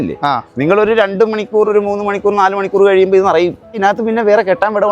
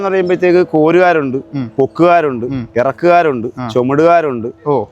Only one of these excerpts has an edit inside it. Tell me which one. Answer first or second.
first